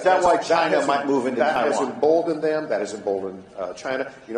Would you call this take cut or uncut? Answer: cut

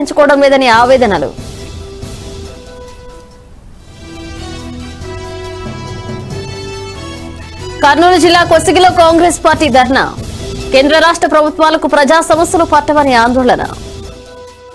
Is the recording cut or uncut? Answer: uncut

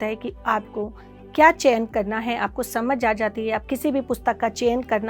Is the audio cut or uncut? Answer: cut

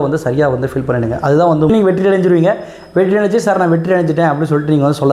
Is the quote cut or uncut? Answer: cut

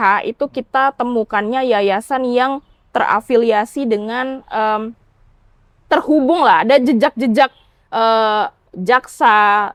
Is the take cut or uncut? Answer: uncut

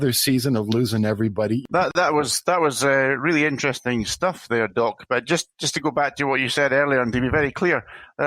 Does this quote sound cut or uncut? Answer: cut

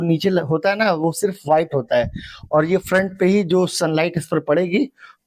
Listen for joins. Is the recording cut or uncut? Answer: uncut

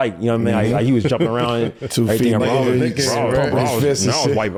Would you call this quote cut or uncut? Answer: uncut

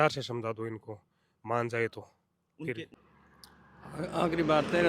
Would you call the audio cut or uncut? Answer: cut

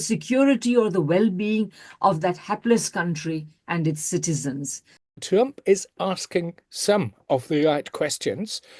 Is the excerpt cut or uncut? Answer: cut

